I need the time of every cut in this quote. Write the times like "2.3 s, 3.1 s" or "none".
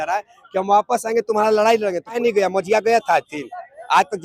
2.2 s